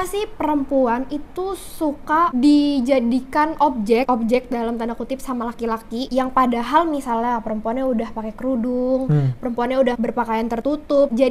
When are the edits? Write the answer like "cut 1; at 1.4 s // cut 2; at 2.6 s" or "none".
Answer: none

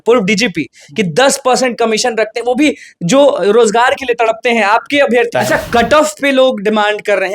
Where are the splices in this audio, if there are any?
cut 1; at 5.3 s

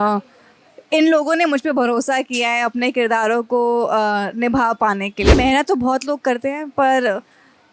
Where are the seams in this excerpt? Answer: cut 1; at 5.3 s

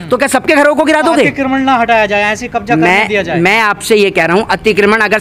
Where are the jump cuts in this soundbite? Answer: none

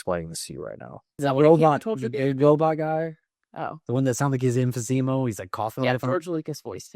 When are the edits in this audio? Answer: cut 1; at 1.1 s

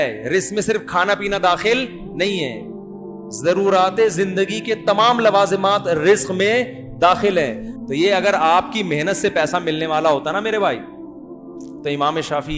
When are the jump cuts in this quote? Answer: cut 1; at 7.7 s

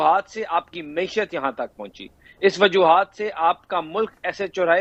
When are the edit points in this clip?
none

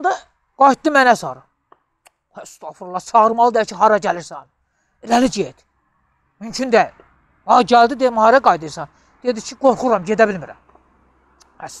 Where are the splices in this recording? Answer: none

